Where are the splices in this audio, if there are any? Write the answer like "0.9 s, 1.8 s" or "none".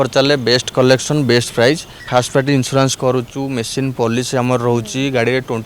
1.9 s